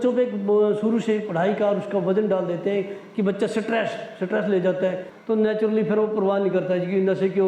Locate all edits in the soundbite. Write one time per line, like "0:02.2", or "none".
0:05.1